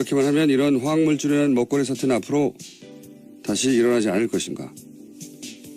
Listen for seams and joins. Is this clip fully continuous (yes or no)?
no